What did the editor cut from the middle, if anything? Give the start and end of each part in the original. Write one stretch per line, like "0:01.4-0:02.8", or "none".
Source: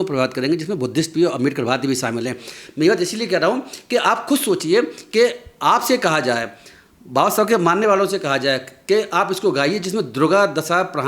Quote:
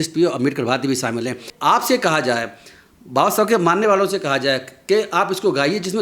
0:02.5-0:05.5